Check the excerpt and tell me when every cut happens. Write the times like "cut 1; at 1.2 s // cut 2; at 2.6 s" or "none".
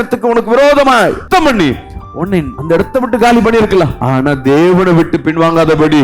cut 1; at 1.3 s // cut 2; at 2.5 s // cut 3; at 4.0 s